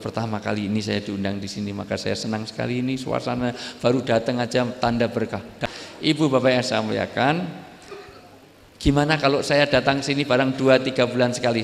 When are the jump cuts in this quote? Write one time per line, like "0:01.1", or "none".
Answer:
0:05.6